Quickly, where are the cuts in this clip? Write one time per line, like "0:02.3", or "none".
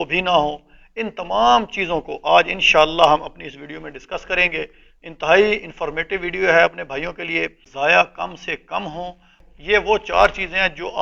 0:07.6
0:09.5